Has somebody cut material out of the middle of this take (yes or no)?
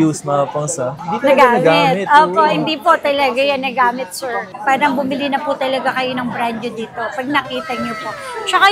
yes